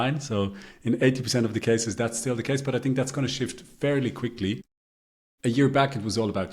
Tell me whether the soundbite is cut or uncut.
uncut